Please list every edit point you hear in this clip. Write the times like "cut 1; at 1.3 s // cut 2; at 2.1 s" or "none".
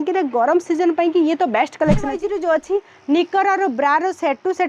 cut 1; at 2.1 s